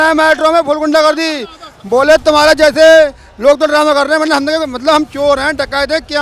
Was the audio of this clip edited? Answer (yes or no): no